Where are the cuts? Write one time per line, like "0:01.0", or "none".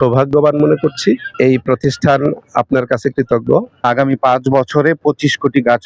0:01.3
0:03.8